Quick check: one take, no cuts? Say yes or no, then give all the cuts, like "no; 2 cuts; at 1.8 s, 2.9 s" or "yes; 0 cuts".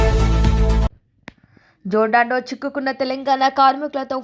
no; 1 cut; at 1.1 s